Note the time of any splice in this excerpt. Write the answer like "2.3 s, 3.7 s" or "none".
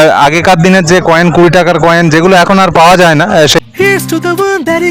3.6 s